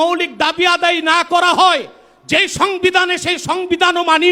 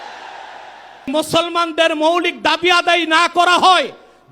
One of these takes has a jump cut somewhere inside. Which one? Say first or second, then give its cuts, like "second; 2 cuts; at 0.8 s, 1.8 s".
second; 1 cut; at 1.1 s